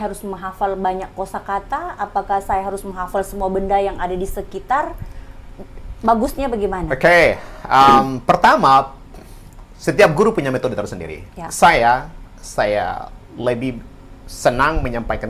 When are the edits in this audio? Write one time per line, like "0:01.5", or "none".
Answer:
none